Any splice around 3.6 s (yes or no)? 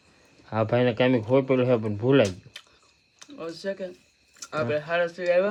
no